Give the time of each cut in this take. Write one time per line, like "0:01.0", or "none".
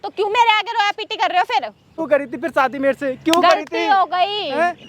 0:02.0

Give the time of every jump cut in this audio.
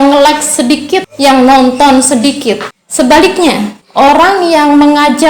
0:01.1
0:02.8
0:03.8

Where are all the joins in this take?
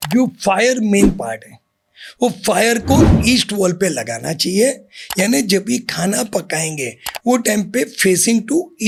none

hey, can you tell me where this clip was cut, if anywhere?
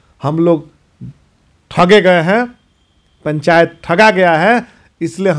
none

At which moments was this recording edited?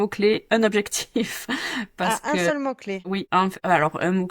0:03.3

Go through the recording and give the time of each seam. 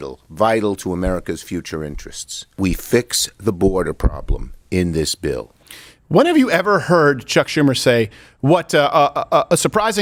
none

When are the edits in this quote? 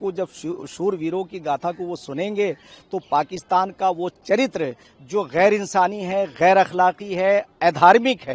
none

